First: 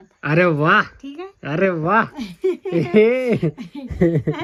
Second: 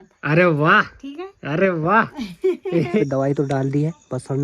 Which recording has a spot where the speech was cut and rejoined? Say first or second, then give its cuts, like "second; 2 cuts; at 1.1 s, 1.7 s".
second; 1 cut; at 3.0 s